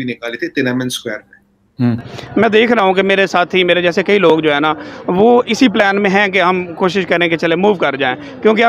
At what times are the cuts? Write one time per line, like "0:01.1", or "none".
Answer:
0:02.1